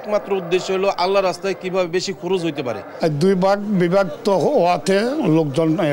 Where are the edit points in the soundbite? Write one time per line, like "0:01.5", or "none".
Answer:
0:02.9